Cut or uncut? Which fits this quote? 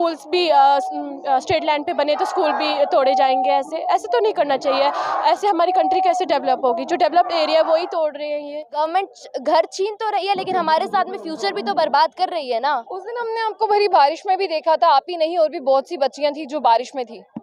cut